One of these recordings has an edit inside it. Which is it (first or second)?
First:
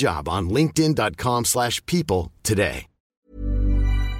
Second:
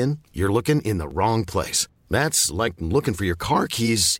first